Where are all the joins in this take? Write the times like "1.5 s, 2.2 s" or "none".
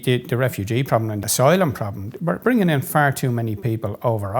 1.2 s, 2.4 s